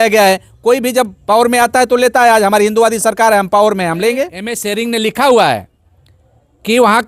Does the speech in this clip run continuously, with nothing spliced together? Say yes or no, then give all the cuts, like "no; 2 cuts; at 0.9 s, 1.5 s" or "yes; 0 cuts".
no; 1 cut; at 4.6 s